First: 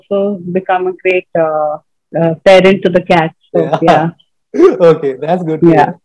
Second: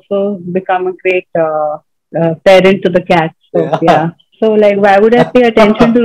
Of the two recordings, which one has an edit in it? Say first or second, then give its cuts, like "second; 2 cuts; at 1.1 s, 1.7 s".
second; 1 cut; at 4.2 s